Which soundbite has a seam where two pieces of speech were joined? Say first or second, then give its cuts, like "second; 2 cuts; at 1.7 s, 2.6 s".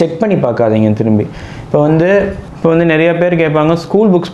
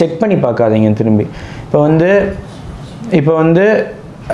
first; 1 cut; at 2.4 s